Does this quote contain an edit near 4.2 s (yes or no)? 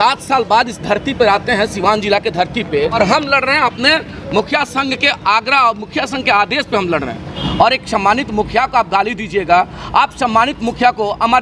no